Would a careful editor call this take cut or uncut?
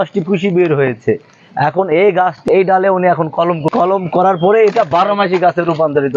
cut